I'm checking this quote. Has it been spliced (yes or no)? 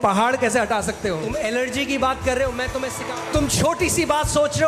yes